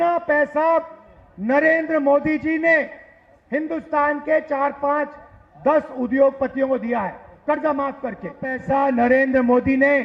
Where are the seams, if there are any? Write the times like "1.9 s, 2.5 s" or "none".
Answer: 8.6 s